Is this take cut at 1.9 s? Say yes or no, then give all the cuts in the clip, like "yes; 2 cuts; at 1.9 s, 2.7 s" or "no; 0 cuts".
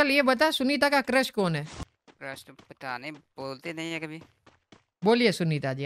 yes; 1 cut; at 1.9 s